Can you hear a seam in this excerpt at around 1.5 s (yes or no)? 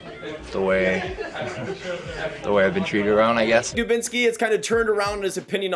no